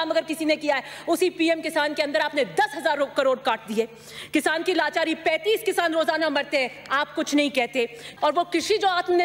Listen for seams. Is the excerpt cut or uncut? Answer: cut